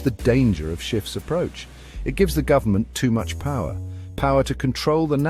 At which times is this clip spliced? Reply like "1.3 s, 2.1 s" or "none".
1.4 s